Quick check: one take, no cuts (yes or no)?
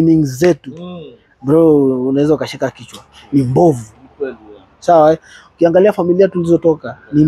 yes